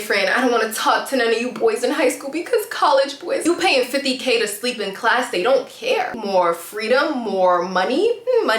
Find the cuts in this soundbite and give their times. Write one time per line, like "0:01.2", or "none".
0:03.4
0:06.1